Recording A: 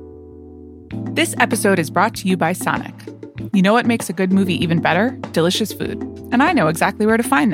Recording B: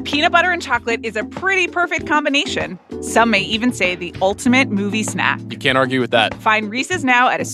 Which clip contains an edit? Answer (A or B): A